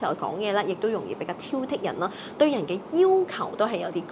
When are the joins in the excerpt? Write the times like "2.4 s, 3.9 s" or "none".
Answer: none